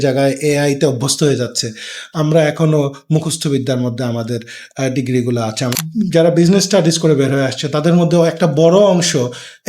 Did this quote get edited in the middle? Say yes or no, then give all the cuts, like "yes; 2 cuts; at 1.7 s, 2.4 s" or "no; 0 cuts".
yes; 1 cut; at 5.8 s